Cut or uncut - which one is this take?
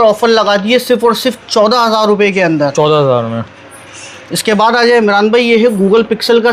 uncut